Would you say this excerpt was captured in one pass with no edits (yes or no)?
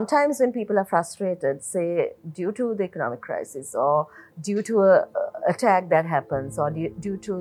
yes